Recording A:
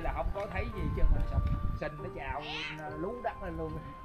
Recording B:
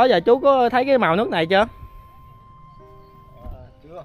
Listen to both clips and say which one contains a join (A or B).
A